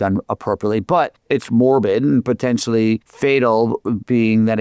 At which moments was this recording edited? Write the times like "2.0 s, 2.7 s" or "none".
1.2 s, 3.1 s